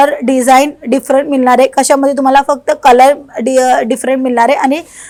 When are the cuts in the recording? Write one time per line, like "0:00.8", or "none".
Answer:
none